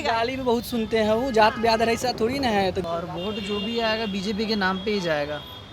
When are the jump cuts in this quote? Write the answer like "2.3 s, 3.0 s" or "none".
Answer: 2.8 s